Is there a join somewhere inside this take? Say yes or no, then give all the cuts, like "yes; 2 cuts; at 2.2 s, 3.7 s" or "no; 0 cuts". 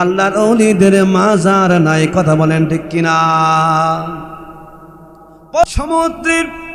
yes; 1 cut; at 5.9 s